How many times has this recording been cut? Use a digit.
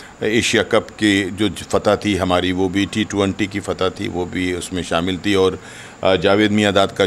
0